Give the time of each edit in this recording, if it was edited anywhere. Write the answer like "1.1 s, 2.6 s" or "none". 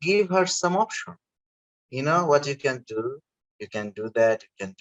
none